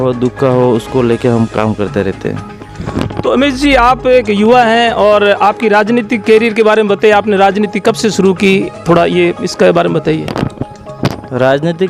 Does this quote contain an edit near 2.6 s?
no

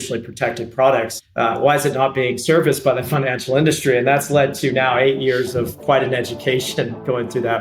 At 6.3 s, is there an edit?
no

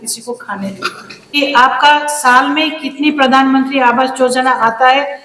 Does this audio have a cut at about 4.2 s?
no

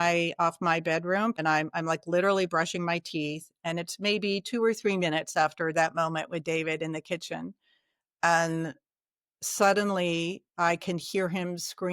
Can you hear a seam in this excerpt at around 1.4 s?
yes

